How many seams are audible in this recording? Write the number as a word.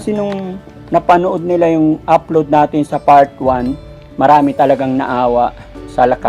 zero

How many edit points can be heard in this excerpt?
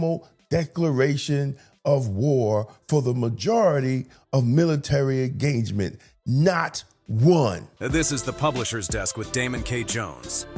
one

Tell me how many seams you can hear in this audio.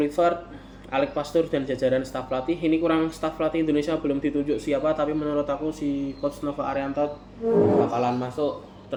zero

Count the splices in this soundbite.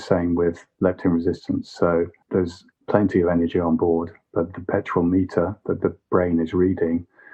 one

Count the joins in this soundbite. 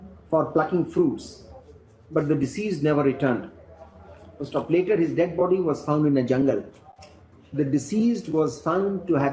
zero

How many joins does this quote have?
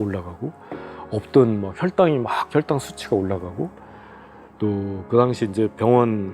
zero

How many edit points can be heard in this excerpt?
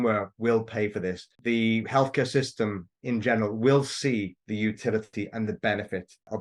zero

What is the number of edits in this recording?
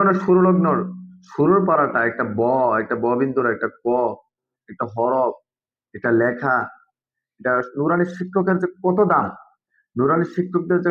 zero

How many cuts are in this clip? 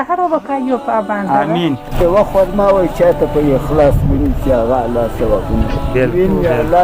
one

